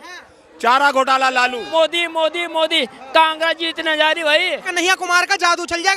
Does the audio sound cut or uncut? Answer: cut